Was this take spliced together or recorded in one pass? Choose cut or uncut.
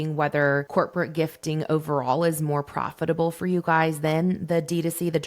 uncut